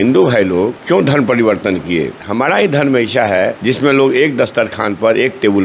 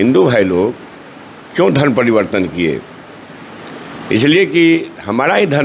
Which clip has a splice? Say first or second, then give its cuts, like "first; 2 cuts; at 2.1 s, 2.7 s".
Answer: first; 3 cuts; at 0.8 s, 2.2 s, 3.6 s